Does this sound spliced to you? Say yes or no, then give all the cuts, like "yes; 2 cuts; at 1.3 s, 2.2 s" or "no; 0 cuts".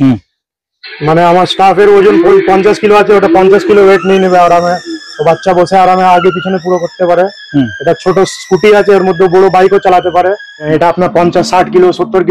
yes; 1 cut; at 10.7 s